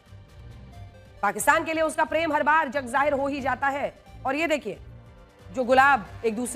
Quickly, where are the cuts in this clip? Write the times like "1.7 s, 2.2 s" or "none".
none

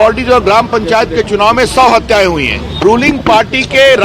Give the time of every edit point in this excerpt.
2.7 s

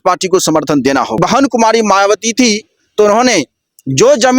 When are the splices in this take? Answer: 1.2 s

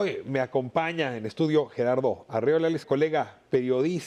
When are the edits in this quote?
none

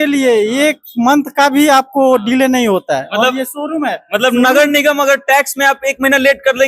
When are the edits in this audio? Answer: none

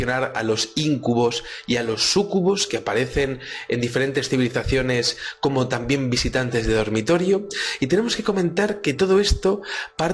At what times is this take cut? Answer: 7.5 s

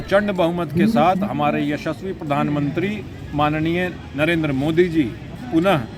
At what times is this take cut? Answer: none

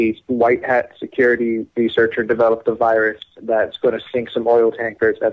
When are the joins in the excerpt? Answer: 2.9 s

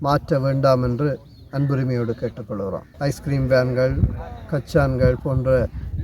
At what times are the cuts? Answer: 2.9 s

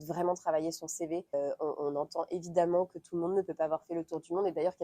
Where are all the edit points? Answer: 1.3 s

